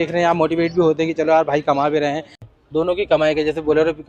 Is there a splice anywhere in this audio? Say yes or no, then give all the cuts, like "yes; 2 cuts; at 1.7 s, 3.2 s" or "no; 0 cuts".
yes; 1 cut; at 2.5 s